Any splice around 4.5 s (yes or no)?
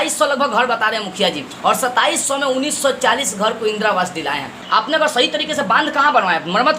yes